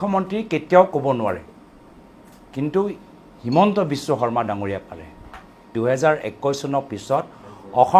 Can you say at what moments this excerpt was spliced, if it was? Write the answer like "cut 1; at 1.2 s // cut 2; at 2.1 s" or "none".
cut 1; at 5.7 s